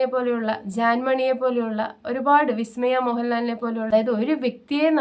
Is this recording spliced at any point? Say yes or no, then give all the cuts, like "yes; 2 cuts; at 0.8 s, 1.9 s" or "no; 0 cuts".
yes; 1 cut; at 3.9 s